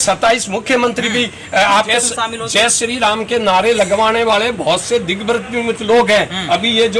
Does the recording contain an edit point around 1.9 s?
yes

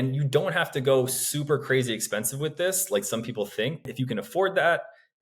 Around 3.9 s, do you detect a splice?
yes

